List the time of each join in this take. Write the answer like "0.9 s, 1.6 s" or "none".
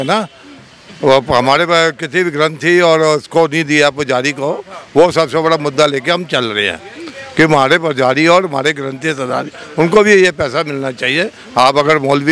none